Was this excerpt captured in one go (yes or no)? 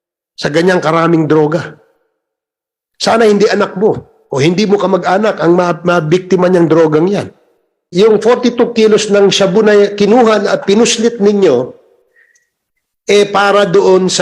no